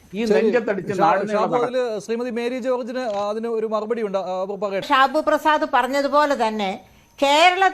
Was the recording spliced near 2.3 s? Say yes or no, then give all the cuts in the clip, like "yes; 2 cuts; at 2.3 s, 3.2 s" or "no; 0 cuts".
no; 1 cut; at 4.9 s